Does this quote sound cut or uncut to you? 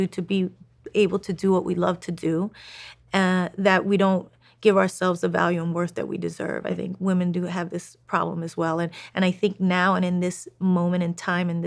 uncut